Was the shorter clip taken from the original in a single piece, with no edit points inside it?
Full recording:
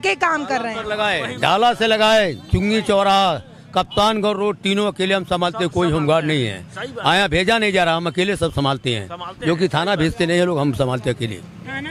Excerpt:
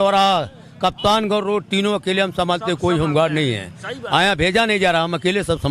yes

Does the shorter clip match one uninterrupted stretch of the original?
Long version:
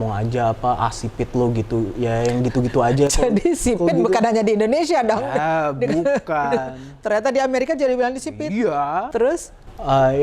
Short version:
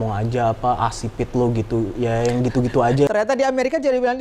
no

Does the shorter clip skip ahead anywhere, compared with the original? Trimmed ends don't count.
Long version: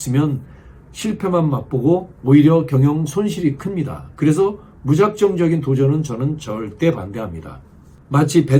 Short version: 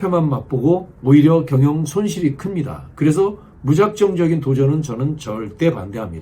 no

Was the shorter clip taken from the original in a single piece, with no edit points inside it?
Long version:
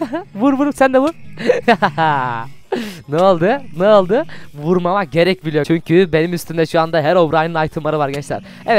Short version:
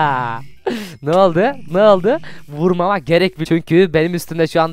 no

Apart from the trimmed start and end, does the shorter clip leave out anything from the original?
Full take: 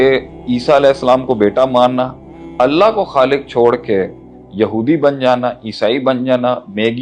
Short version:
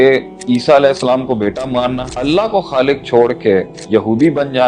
yes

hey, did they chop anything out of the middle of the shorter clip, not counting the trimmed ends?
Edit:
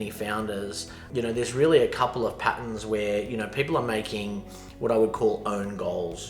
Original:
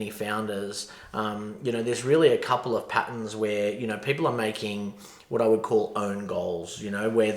yes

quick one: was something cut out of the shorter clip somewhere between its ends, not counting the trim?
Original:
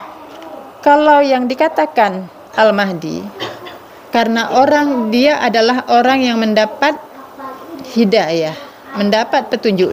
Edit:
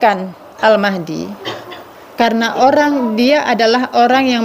no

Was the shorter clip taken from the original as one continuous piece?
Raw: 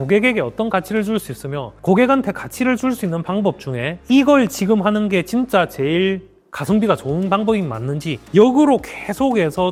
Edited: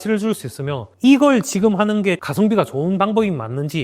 no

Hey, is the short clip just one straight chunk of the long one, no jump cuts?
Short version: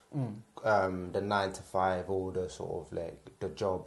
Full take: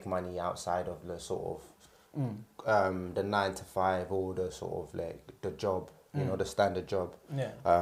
yes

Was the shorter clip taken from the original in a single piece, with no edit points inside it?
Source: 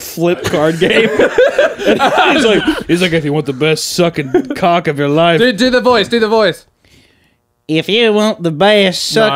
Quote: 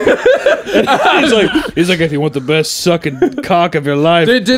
yes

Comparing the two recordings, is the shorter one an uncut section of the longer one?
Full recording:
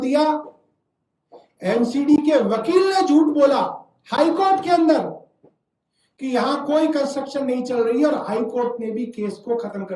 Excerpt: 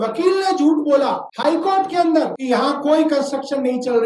no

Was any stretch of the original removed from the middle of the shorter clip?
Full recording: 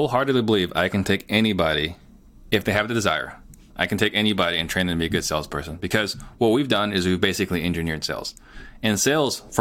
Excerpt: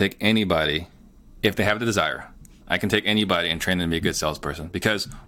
no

